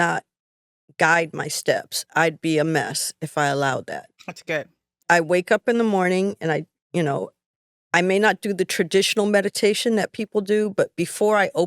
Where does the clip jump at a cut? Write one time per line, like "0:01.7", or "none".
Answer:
0:04.9